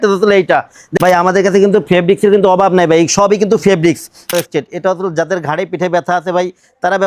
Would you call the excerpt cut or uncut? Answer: cut